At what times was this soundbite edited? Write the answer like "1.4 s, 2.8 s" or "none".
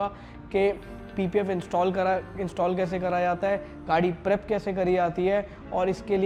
none